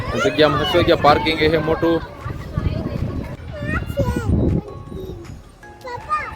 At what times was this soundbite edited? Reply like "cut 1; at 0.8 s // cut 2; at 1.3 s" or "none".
cut 1; at 3.3 s